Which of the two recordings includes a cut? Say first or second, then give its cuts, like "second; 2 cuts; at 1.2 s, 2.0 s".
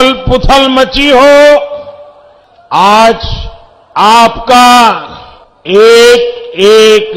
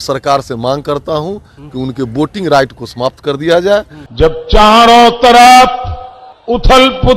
second; 1 cut; at 4.0 s